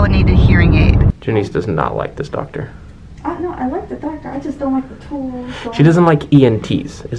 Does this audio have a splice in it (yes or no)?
yes